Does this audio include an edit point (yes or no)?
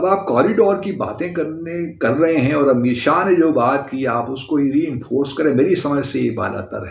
no